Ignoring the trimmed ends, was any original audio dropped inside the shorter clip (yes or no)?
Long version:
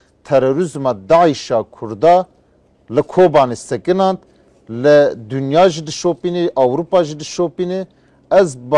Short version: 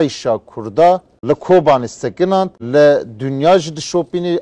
yes